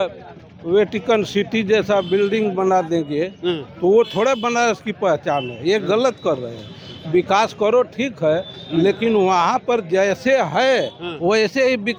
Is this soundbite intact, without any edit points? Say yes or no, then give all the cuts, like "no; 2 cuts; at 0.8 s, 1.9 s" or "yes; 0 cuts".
yes; 0 cuts